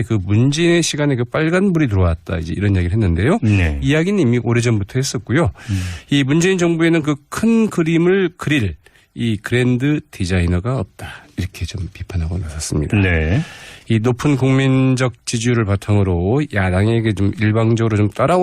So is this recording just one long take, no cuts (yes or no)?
no